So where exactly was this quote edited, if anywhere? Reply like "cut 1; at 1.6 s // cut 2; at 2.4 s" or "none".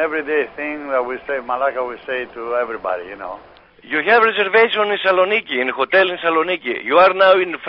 cut 1; at 3.5 s